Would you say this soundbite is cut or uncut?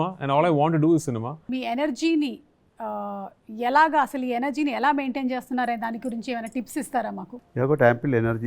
cut